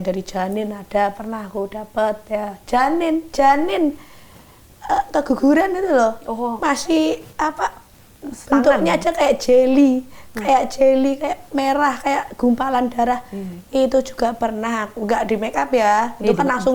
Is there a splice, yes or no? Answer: no